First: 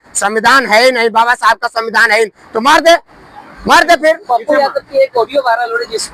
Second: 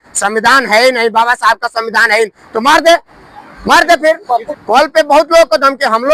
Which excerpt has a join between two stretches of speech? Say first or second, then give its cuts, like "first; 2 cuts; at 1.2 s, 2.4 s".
second; 1 cut; at 4.5 s